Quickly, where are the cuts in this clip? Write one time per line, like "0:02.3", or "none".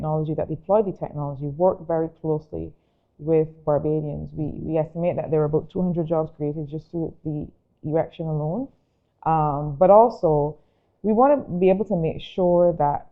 none